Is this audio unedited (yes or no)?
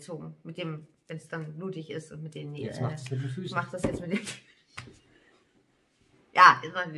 no